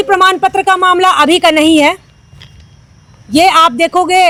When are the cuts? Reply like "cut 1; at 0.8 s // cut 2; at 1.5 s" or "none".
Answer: none